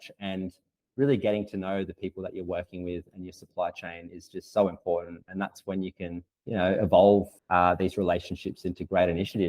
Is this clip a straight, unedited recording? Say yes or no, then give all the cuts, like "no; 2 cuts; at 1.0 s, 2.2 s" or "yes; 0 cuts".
no; 2 cuts; at 6.3 s, 7.4 s